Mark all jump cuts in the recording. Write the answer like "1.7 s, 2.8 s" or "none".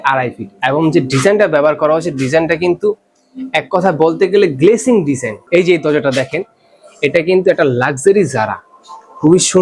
5.3 s

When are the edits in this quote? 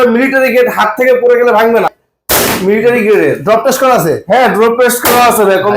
2.0 s

